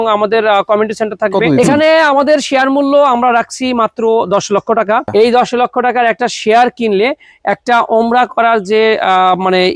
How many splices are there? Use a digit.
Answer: 2